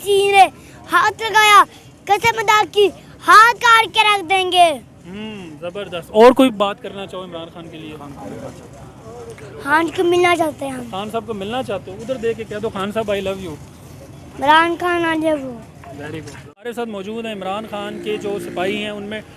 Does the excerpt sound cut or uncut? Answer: uncut